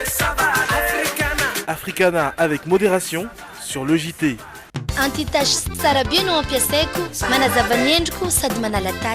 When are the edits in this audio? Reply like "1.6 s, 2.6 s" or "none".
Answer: 4.6 s